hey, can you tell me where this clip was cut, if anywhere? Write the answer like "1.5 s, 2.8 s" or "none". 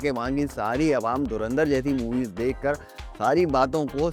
none